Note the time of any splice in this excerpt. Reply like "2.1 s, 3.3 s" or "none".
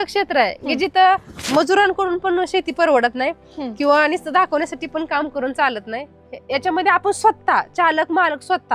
none

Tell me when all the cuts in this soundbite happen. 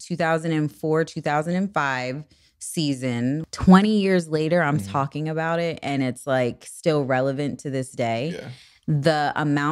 3.5 s

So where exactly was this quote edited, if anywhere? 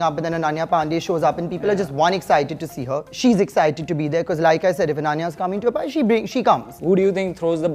3.1 s, 6.7 s

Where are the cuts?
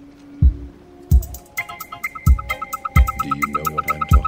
1.1 s

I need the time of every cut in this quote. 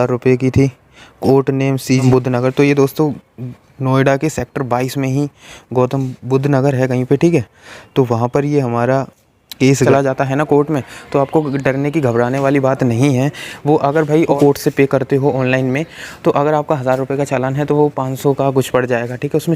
2.0 s, 9.9 s, 14.3 s

